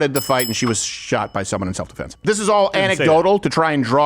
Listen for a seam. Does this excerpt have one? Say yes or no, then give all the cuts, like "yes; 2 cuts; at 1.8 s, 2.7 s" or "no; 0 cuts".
yes; 1 cut; at 2.2 s